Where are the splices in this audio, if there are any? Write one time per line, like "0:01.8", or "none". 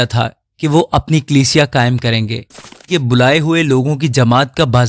0:02.8